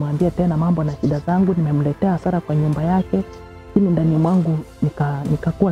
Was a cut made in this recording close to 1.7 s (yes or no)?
no